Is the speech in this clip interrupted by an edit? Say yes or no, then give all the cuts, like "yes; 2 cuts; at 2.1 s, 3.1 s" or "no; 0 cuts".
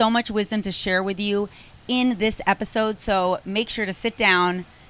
no; 0 cuts